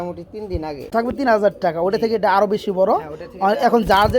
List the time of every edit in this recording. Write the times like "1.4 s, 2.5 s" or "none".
0.9 s